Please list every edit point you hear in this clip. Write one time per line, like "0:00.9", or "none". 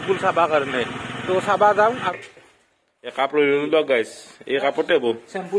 0:02.0